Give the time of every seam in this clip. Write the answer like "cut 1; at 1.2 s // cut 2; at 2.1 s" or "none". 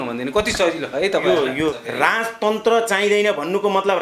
cut 1; at 1.8 s